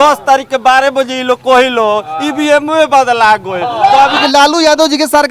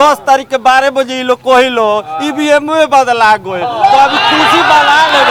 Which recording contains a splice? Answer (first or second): first